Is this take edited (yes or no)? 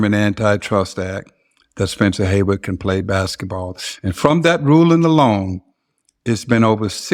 no